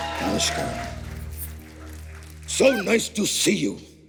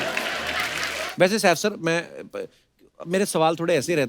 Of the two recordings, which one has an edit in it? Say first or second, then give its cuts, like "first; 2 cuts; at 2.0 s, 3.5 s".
second; 1 cut; at 1.0 s